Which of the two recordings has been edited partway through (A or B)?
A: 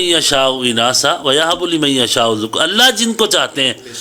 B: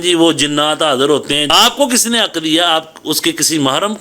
B